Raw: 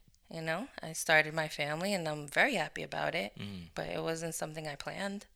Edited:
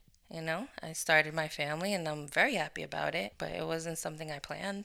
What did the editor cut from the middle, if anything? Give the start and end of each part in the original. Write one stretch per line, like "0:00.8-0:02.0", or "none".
0:03.3-0:03.7